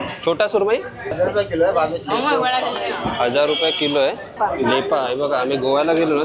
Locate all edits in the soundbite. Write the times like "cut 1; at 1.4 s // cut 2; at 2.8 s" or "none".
cut 1; at 1.1 s // cut 2; at 4.4 s